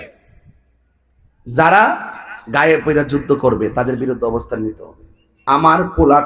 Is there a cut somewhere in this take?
yes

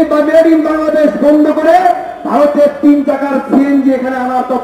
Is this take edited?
no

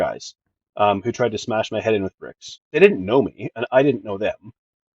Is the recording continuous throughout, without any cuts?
no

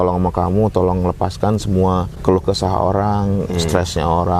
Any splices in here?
yes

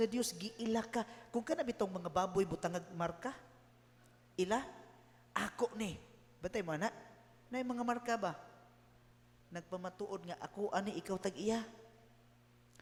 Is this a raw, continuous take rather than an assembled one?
yes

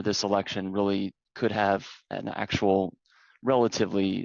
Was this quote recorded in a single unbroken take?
yes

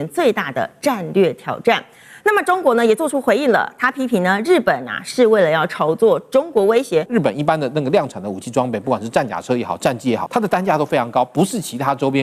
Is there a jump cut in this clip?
yes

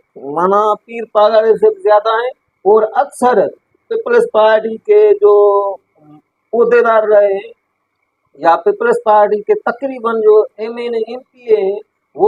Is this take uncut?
yes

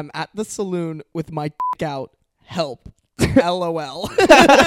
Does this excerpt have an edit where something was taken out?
no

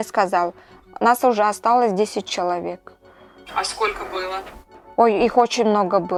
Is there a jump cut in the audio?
no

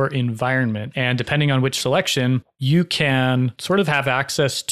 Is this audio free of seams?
no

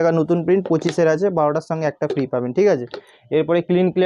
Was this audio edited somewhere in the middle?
no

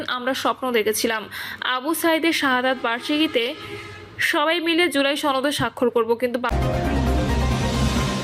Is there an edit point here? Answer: yes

